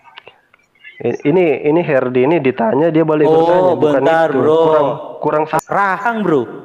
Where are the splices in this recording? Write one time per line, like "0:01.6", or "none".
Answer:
0:05.6